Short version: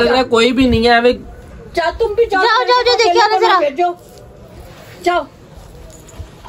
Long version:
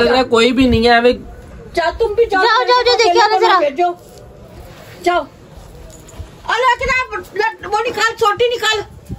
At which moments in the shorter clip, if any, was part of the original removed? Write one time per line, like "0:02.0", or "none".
none